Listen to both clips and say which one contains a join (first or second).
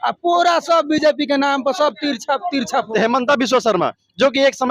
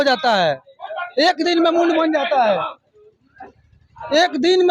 first